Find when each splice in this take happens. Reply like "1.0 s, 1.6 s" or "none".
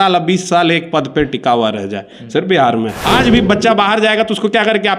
3.0 s